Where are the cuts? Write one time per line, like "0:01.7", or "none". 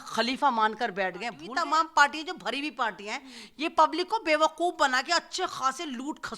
0:01.4